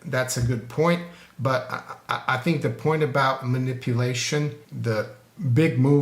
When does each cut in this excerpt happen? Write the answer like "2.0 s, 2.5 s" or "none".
4.7 s